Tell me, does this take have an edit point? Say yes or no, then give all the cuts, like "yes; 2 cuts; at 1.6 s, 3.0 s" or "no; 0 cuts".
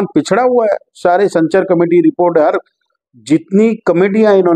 no; 0 cuts